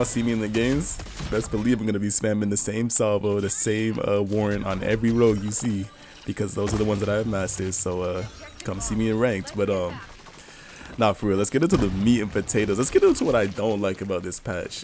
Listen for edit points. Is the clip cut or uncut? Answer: uncut